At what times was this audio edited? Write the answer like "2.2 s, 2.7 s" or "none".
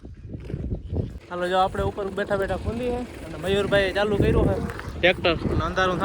1.3 s